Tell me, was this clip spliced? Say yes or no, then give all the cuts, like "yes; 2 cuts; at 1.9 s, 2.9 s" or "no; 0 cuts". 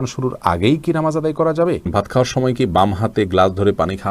yes; 1 cut; at 1.9 s